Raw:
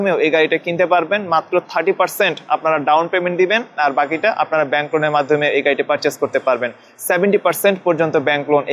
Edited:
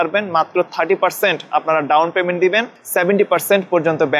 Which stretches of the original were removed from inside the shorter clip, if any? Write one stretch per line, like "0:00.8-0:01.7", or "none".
0:03.7-0:06.8